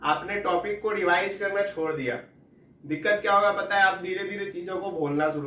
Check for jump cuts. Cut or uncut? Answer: uncut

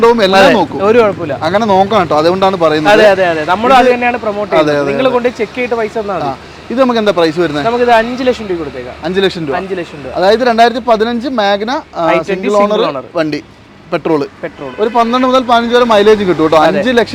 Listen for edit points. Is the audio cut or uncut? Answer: uncut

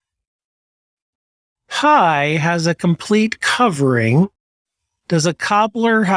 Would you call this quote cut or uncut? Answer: uncut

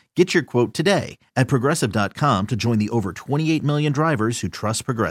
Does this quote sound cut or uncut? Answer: uncut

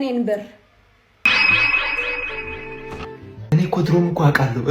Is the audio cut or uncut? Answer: cut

